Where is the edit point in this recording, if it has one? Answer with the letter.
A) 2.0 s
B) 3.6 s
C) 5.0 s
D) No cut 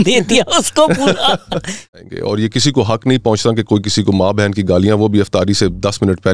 A